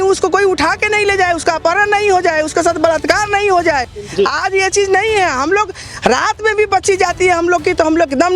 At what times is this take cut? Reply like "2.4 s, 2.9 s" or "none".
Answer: none